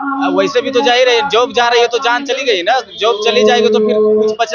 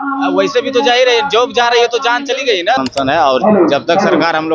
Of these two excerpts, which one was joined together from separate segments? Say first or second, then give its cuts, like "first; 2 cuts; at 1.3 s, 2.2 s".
second; 1 cut; at 2.8 s